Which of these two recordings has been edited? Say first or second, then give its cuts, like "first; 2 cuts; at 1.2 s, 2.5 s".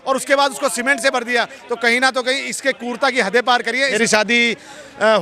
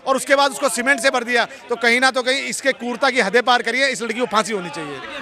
first; 1 cut; at 3.9 s